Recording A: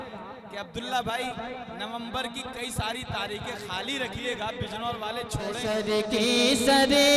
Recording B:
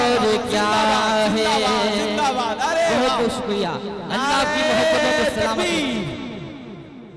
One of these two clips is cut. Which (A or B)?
A